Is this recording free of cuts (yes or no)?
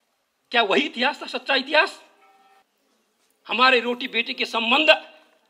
no